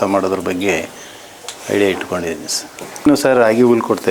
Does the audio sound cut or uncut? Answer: cut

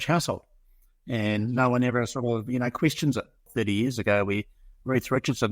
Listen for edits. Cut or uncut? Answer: cut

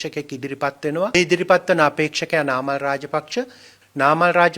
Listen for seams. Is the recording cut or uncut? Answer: cut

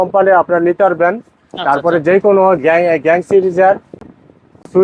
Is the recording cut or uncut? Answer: uncut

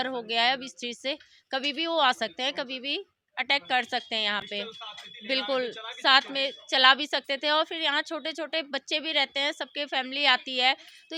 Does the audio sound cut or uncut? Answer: uncut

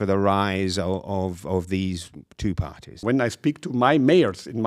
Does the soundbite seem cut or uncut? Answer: cut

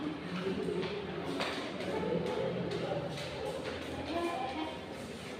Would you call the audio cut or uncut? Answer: uncut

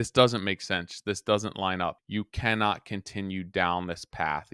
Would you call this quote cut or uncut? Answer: cut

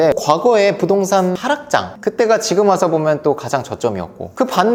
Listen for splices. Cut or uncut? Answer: uncut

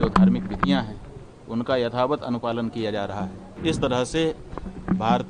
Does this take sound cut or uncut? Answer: cut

